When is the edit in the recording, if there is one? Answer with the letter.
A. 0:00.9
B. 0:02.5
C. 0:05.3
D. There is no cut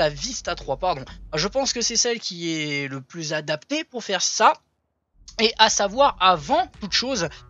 B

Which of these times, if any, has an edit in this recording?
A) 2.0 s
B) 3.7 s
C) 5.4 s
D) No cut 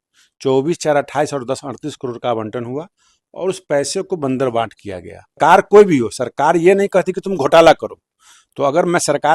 C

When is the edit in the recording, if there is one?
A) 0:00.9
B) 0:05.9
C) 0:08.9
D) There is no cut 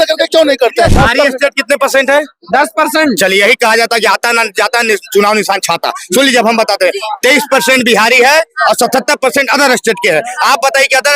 A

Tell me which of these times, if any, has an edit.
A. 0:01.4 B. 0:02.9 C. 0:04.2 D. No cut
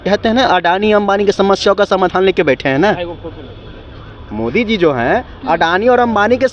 D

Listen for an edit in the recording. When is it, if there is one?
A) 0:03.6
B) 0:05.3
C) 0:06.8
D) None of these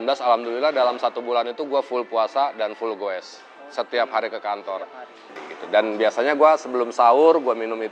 B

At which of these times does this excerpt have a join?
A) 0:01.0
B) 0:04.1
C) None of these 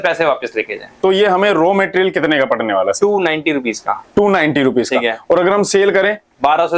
A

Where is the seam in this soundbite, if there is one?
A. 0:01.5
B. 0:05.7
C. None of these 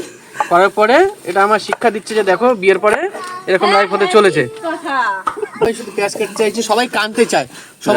B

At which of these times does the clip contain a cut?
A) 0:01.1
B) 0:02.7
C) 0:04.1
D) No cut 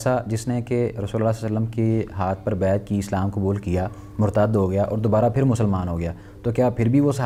D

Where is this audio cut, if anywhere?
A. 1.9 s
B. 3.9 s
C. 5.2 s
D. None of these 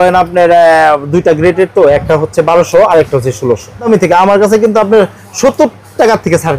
B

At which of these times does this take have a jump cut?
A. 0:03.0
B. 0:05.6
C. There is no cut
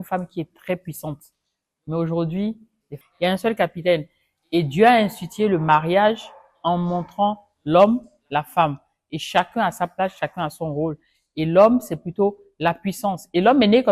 A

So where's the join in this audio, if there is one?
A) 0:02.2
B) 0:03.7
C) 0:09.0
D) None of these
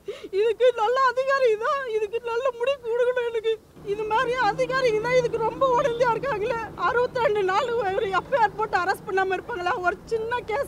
B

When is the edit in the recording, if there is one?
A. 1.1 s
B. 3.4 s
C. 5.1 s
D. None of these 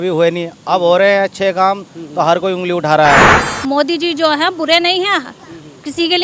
B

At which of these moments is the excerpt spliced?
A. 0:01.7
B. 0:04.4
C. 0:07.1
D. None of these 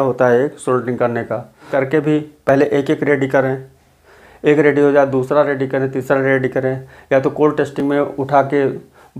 A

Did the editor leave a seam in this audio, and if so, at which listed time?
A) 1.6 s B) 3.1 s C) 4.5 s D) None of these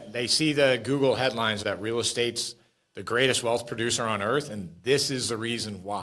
A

